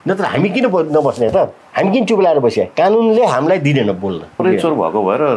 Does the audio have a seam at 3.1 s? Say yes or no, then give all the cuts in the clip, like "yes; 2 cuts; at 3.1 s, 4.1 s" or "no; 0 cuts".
no; 2 cuts; at 1.6 s, 4.4 s